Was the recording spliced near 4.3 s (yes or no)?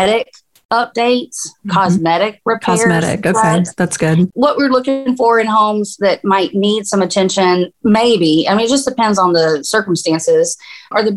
yes